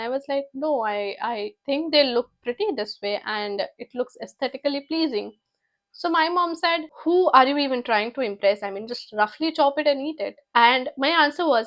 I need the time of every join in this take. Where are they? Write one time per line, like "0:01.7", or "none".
0:06.9
0:10.3